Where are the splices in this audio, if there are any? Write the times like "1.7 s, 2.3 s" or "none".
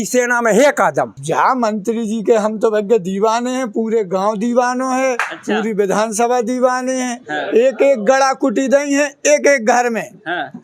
1.2 s